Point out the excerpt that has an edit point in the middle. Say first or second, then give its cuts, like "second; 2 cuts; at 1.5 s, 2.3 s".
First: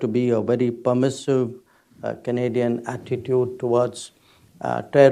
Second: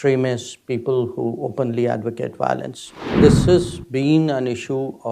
second; 1 cut; at 3.1 s